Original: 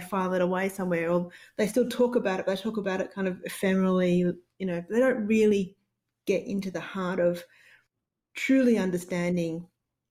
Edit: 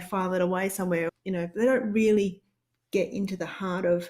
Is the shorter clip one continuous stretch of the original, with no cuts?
no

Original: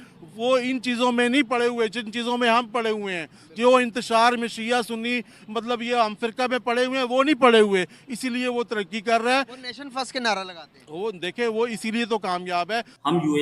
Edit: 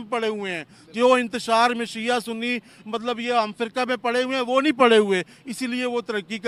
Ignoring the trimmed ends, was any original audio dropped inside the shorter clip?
no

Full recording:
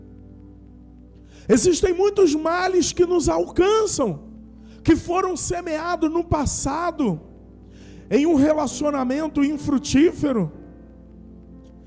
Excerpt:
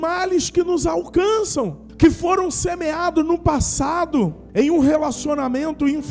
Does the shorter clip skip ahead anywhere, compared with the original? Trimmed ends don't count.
yes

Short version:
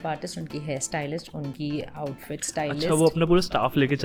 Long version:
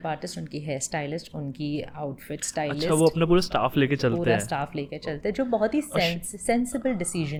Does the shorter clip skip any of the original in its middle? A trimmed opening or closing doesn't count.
no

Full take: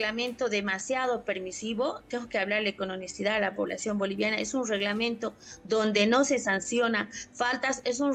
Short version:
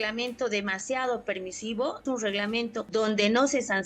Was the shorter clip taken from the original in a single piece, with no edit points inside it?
no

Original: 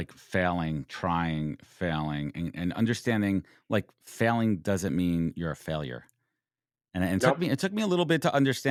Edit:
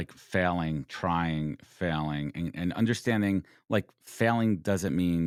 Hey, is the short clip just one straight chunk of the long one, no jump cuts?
yes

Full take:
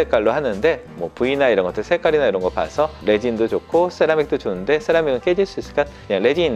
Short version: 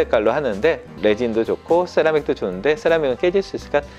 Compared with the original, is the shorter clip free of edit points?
no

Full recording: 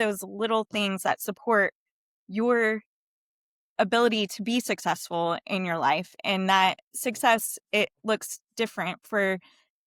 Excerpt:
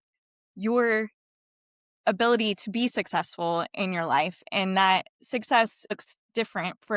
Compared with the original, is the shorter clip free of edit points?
no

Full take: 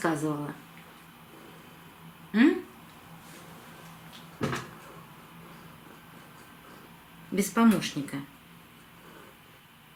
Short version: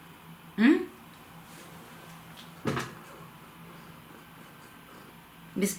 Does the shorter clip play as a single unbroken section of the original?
yes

